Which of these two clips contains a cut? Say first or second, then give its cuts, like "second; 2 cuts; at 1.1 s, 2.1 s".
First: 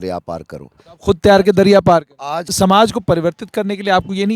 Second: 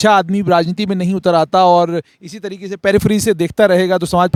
first; 1 cut; at 2.5 s